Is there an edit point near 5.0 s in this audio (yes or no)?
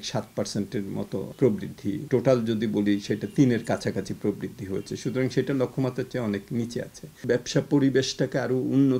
no